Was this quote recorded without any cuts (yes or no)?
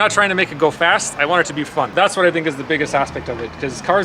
no